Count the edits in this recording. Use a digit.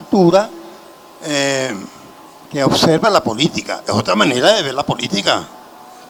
0